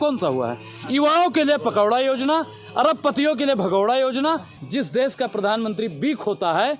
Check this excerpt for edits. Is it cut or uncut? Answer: cut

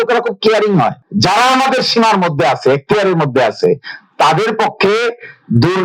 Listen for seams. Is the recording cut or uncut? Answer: cut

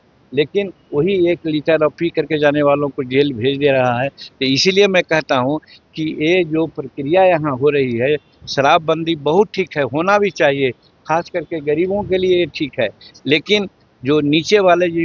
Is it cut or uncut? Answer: uncut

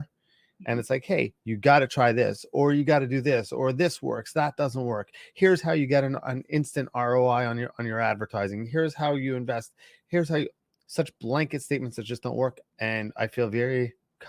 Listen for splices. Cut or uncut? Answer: cut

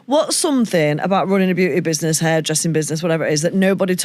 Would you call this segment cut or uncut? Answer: uncut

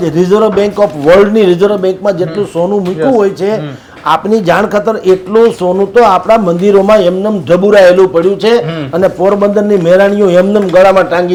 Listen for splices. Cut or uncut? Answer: uncut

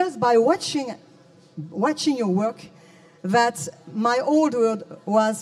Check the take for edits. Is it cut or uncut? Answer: cut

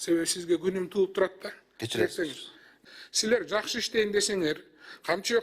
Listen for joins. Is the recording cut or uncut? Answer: cut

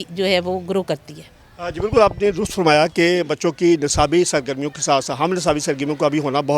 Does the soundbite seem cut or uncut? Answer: uncut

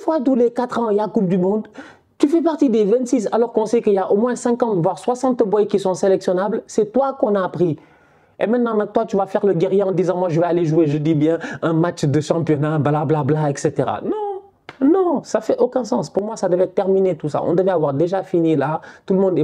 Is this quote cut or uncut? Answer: uncut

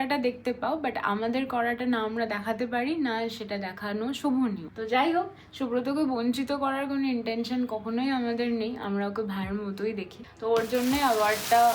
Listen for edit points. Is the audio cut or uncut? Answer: uncut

